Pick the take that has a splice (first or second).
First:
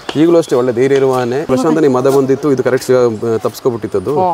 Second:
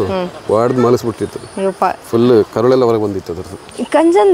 first